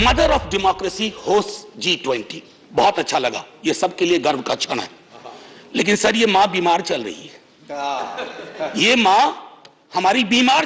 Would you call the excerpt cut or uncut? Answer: uncut